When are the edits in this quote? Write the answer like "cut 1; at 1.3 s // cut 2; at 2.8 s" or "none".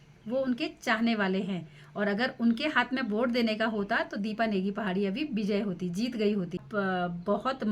cut 1; at 6.7 s